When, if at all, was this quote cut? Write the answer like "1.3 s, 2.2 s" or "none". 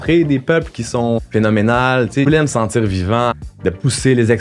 1.2 s, 2.2 s, 3.4 s